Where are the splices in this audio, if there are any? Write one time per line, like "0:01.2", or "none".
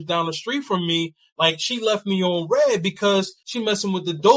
0:03.4